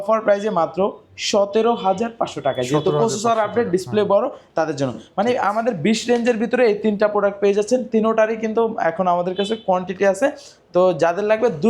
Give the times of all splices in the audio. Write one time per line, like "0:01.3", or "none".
none